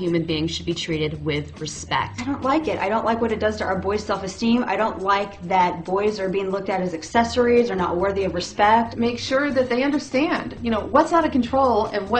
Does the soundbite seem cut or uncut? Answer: cut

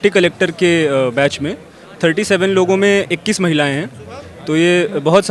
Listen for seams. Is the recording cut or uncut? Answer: uncut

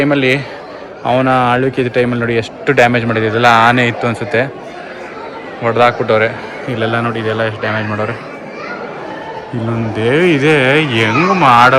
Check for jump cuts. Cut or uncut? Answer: uncut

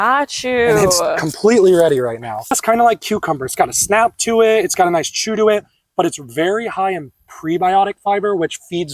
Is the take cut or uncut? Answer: cut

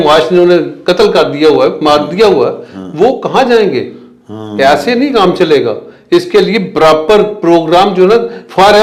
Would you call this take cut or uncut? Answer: uncut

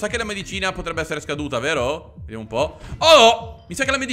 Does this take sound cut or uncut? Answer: uncut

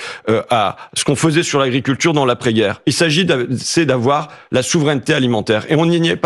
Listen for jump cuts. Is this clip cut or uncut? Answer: uncut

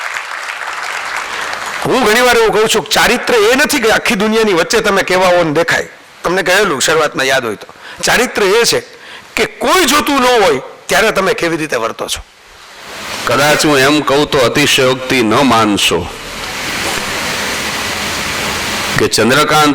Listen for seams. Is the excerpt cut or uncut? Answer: cut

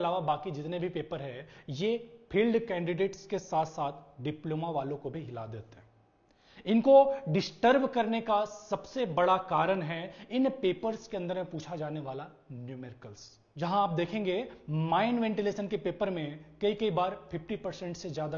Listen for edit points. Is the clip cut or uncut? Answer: uncut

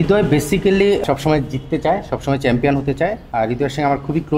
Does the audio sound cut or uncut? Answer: cut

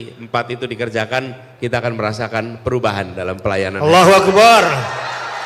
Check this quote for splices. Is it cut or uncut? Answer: uncut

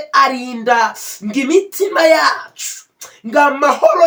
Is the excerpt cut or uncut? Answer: uncut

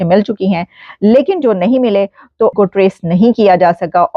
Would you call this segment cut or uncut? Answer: uncut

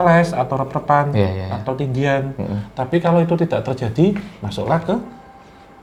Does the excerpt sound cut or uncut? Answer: uncut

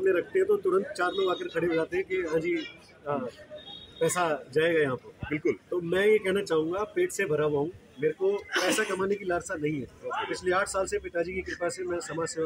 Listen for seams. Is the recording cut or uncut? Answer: uncut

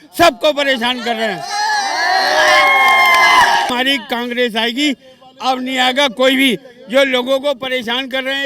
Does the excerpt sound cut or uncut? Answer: cut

